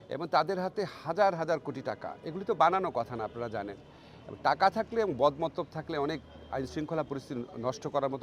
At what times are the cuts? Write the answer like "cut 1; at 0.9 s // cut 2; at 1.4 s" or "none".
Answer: none